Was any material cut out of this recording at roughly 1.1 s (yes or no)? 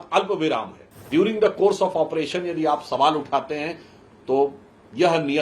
yes